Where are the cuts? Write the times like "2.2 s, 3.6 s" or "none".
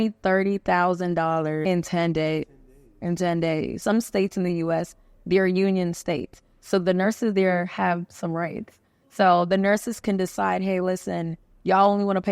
1.6 s, 3.8 s

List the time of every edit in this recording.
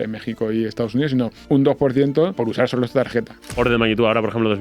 1.4 s, 2.3 s, 3.6 s

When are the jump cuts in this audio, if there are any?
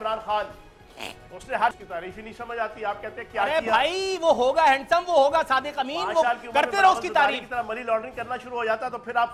1.8 s

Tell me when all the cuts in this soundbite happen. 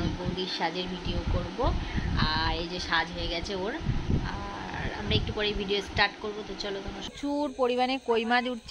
7.1 s

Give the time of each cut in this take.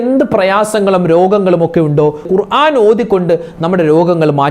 2.3 s

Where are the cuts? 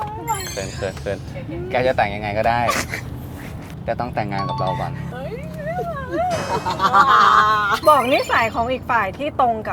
5.1 s, 7.7 s

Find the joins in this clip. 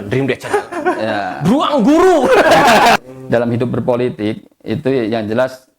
3.0 s

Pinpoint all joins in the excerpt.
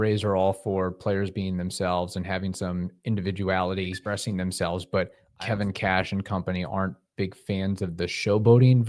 4.0 s, 5.2 s

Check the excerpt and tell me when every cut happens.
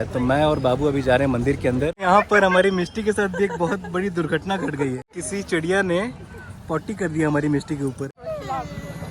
2.0 s, 5.1 s, 8.2 s

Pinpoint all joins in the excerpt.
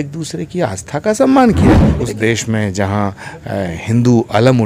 1.9 s

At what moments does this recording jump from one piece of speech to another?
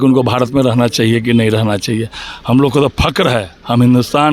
none

